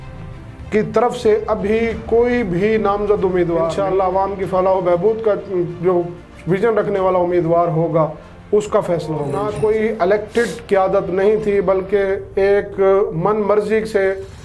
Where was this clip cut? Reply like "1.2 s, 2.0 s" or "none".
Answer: 3.8 s, 9.4 s

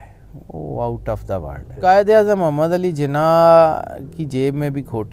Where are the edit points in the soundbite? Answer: 1.7 s

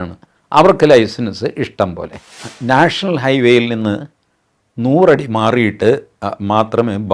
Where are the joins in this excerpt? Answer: 2.4 s

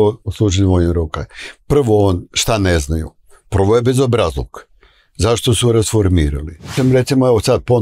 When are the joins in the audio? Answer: 6.7 s

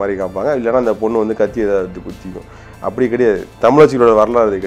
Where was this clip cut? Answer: 3.5 s

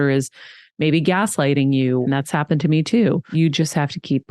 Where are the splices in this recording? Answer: 2.0 s, 3.3 s

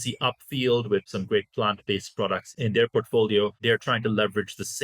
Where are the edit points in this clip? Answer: 1.1 s, 2.5 s, 3.6 s

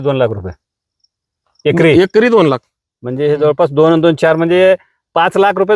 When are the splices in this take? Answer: none

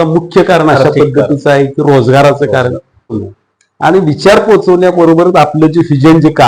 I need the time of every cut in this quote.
3.2 s

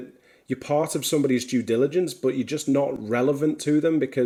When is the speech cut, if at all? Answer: none

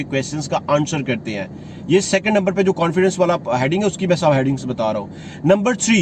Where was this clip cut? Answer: none

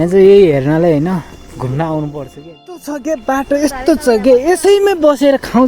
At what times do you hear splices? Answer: 2.9 s

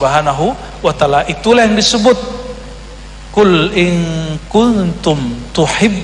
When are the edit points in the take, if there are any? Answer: none

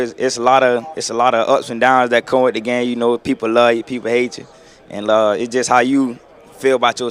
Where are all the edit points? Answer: none

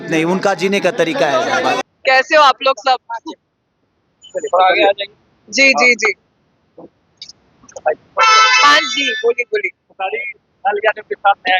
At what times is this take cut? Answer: none

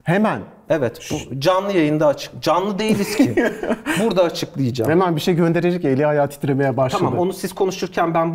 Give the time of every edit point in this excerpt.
none

